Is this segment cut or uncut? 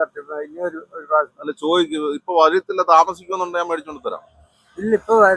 uncut